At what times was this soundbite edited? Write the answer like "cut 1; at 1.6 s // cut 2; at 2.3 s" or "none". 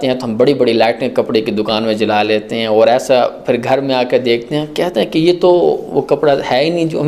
none